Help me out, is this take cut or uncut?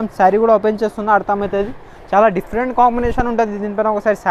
uncut